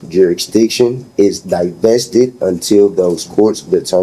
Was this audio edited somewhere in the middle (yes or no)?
no